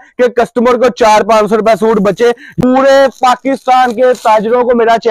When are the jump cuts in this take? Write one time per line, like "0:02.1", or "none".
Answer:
0:02.5